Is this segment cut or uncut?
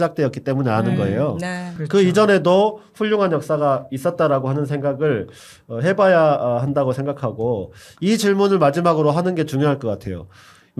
cut